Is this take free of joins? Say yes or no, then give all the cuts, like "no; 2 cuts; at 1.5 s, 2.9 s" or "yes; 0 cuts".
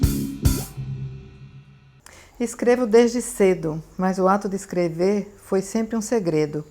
no; 1 cut; at 1.6 s